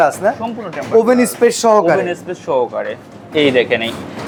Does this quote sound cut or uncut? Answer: uncut